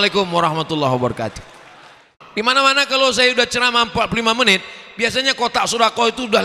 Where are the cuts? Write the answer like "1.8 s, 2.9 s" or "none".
2.2 s